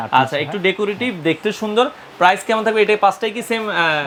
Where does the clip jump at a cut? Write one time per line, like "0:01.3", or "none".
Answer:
none